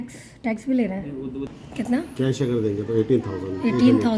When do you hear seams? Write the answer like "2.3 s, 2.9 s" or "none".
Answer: 1.6 s